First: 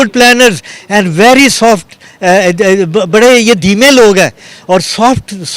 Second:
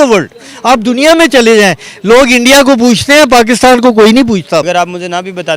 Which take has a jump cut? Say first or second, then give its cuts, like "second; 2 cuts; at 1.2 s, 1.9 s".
second; 1 cut; at 4.6 s